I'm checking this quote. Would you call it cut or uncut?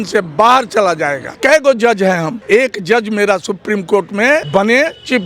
cut